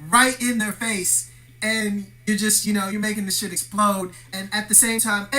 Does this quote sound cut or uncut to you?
cut